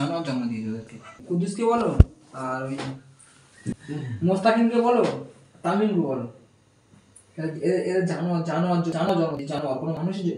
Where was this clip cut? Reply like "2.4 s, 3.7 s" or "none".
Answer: 1.1 s, 3.7 s